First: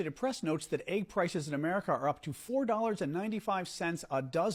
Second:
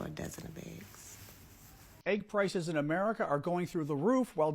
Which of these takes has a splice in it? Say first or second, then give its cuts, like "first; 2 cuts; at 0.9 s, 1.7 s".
second; 1 cut; at 2.0 s